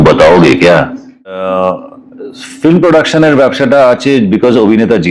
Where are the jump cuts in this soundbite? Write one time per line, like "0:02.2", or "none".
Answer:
0:01.4